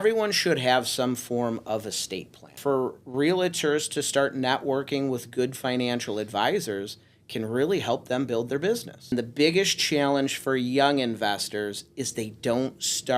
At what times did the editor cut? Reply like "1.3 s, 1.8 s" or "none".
2.6 s, 9.1 s